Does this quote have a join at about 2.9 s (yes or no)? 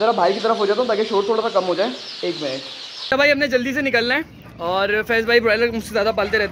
yes